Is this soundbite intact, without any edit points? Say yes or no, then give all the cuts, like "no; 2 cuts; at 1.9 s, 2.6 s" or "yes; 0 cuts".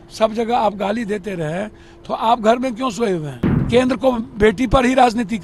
no; 1 cut; at 3.6 s